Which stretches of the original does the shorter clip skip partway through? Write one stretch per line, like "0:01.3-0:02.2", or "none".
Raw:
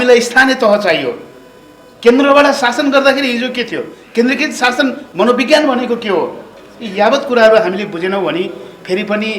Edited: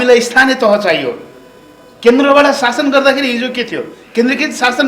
none